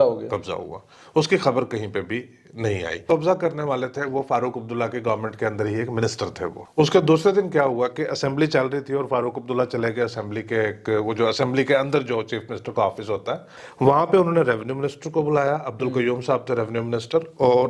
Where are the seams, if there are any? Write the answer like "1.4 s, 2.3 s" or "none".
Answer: 3.0 s, 6.6 s, 13.5 s